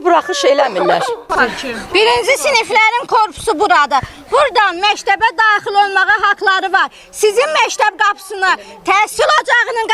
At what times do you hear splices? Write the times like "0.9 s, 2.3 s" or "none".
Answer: 1.2 s